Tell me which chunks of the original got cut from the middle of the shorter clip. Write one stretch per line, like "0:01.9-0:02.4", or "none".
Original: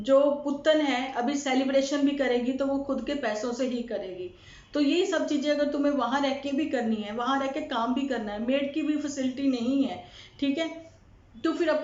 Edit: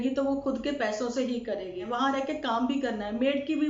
0:04.3-0:07.1